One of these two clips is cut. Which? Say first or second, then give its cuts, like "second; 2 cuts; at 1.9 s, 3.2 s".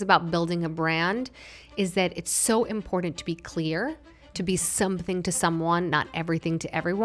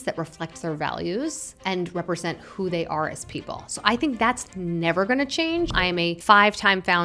second; 2 cuts; at 1.5 s, 5.7 s